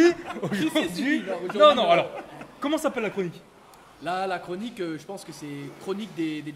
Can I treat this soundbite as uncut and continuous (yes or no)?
yes